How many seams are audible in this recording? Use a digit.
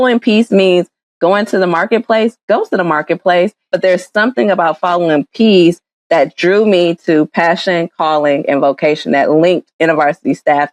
1